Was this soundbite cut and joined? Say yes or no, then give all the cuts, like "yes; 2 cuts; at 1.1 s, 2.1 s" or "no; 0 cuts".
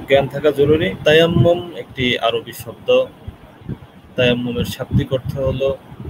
yes; 1 cut; at 1.0 s